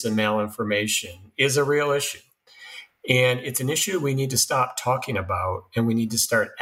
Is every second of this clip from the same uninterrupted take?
yes; 0 cuts

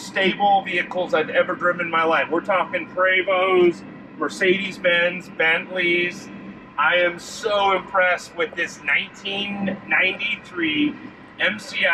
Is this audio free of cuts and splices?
yes; 0 cuts

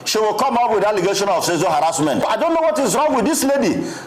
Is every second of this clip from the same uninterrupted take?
no; 1 cut; at 2.3 s

